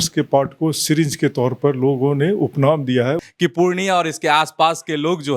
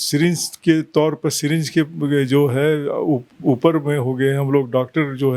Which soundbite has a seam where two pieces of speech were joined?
first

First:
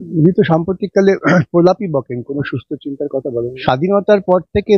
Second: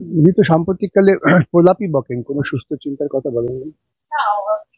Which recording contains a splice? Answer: first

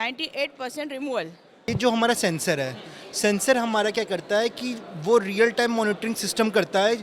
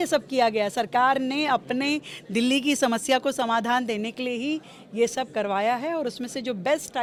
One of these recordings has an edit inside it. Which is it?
first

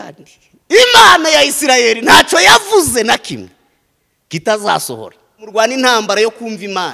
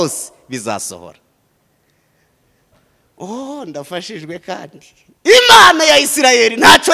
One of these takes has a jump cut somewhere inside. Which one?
first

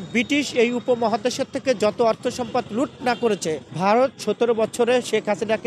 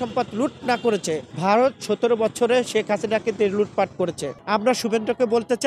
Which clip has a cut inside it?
second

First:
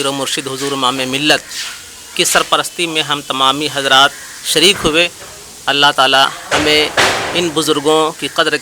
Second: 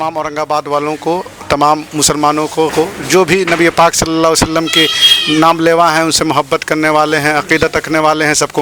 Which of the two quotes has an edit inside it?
second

